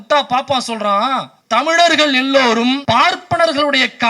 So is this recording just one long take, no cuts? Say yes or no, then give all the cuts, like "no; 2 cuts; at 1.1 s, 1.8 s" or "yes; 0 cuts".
no; 2 cuts; at 1.3 s, 2.8 s